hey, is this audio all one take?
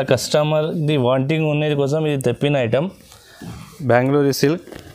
no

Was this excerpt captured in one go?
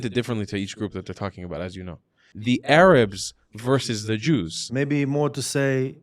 no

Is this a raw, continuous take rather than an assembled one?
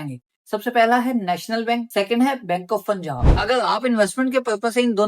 no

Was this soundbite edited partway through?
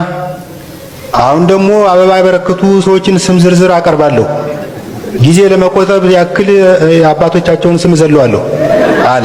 no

